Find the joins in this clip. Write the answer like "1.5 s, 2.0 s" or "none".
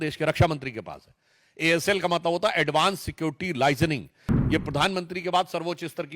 4.4 s